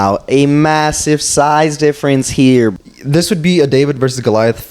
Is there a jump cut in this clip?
yes; 1 cut; at 2.7 s

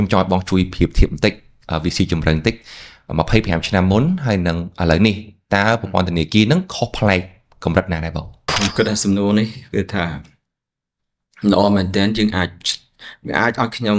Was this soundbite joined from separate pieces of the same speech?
yes; 1 cut; at 8.5 s

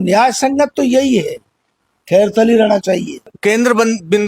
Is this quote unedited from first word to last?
no; 1 cut; at 3.3 s

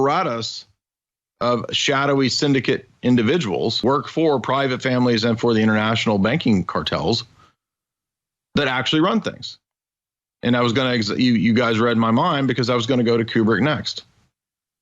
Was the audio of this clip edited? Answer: yes; 1 cut; at 3.8 s

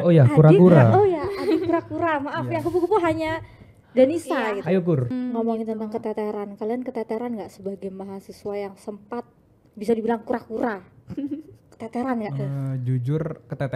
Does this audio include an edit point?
yes; 1 cut; at 5.1 s

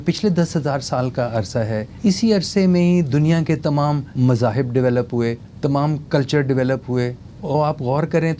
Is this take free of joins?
no; 4 cuts; at 1.9 s, 4.1 s, 5.5 s, 7.3 s

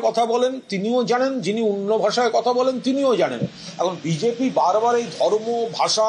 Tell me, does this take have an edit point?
no; 0 cuts

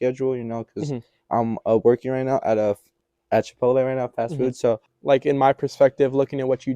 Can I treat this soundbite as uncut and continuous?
no; 1 cut; at 4.9 s

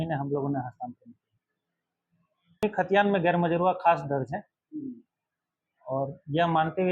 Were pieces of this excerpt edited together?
yes; 1 cut; at 2.6 s

